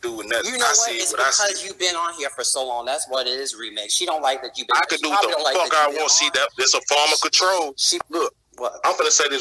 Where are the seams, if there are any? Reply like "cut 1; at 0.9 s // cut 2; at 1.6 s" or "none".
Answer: cut 1; at 7.9 s